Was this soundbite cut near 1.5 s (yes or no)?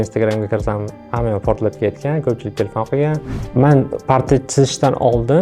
no